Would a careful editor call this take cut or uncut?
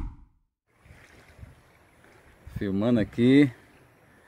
cut